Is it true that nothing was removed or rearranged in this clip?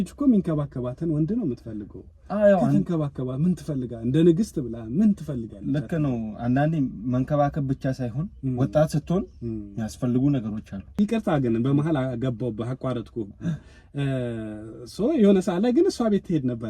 no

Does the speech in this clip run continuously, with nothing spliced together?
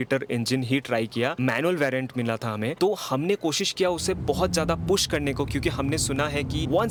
yes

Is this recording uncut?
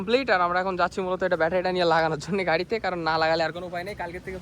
yes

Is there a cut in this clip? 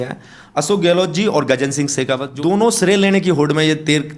yes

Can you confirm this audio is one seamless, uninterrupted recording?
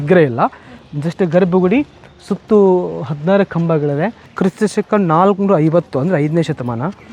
no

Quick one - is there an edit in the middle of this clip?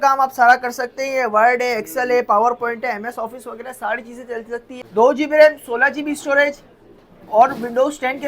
yes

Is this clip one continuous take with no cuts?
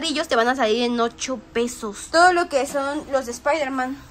no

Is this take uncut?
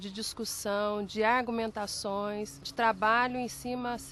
no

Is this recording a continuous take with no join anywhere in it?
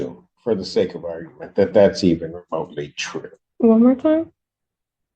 no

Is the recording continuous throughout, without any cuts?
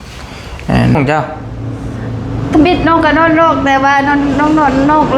no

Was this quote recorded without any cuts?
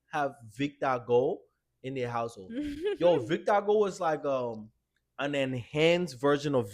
yes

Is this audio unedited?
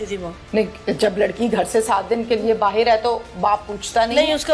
yes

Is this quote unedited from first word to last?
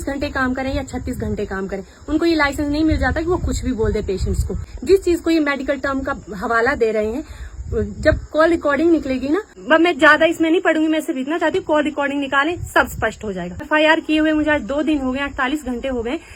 no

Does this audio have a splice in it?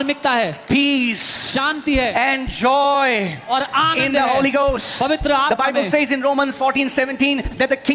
no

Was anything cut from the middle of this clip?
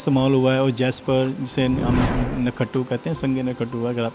no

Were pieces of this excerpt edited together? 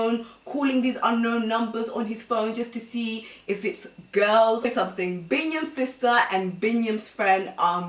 yes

